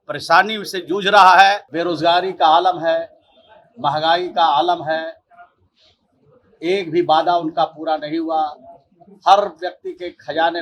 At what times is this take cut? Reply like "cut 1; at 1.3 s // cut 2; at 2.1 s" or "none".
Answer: cut 1; at 1.7 s